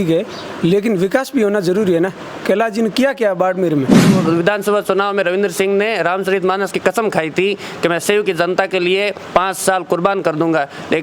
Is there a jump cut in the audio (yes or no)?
yes